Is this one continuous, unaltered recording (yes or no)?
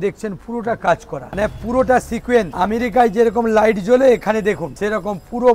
no